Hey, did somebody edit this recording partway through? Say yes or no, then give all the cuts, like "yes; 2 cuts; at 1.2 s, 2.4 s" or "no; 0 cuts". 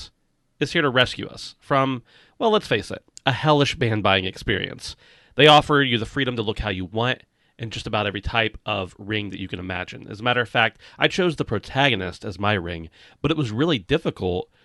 no; 0 cuts